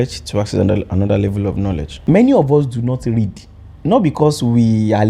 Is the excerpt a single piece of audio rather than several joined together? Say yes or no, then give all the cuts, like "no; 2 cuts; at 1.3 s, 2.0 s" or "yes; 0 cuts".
no; 1 cut; at 1.9 s